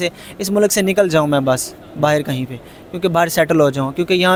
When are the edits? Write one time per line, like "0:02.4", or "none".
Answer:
none